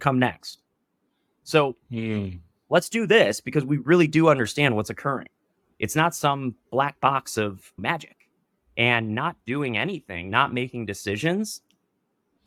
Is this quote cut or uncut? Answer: uncut